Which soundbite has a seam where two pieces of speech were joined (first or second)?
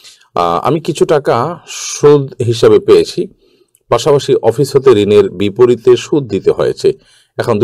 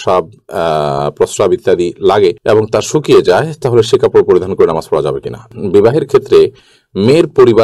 second